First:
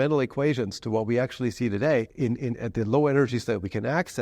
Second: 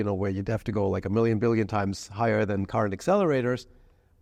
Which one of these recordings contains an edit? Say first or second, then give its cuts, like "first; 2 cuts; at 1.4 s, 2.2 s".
first; 1 cut; at 2.1 s